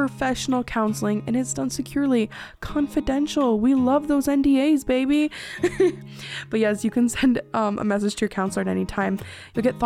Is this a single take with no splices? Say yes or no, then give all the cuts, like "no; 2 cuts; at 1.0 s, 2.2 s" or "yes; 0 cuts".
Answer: yes; 0 cuts